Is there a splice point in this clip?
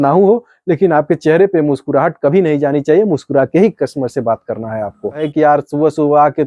yes; 1 cut; at 5.2 s

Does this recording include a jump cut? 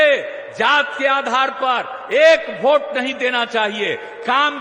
no; 0 cuts

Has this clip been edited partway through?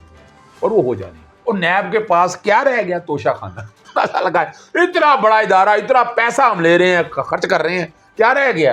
yes; 1 cut; at 1.3 s

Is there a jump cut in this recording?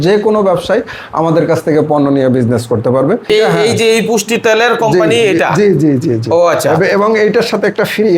yes; 1 cut; at 3.3 s

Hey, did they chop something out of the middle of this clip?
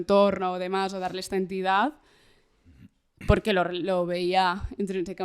no; 0 cuts

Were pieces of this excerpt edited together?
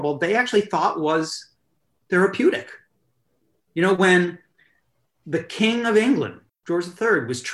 yes; 1 cut; at 6.4 s

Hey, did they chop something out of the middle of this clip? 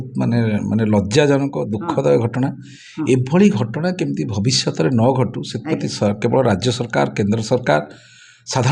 no; 0 cuts

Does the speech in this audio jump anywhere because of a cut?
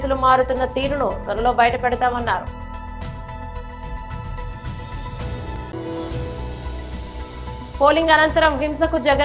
no; 0 cuts

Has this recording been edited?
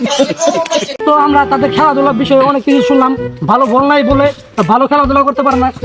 no; 0 cuts

